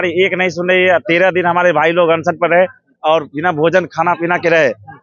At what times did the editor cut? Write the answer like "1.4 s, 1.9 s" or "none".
none